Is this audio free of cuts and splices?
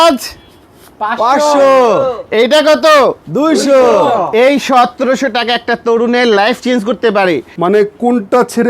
no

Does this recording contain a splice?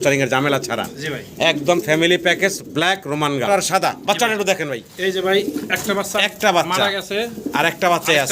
yes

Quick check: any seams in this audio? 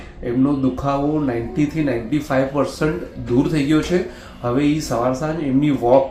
no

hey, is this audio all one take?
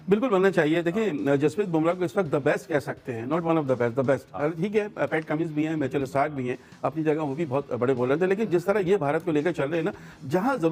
yes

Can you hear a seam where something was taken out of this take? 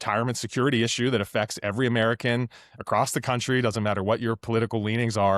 no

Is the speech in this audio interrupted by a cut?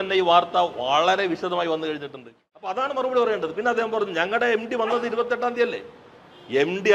yes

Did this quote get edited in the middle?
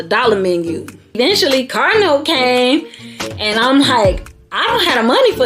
yes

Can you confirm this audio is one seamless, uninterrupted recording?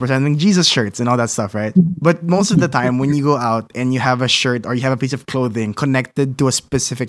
yes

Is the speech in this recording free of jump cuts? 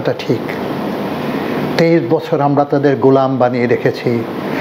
yes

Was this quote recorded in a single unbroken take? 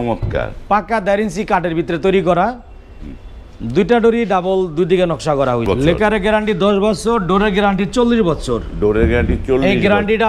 no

